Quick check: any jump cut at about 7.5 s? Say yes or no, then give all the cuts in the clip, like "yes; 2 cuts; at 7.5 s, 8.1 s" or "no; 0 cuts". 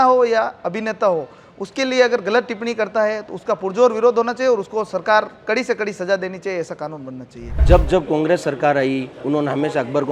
yes; 1 cut; at 7.5 s